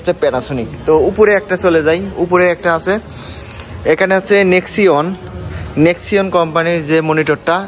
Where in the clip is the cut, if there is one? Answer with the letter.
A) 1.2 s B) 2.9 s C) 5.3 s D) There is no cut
D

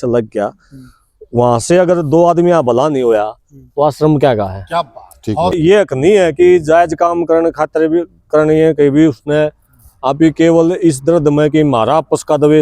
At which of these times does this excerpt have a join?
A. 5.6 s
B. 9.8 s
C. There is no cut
A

